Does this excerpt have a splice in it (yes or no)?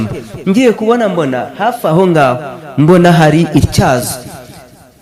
no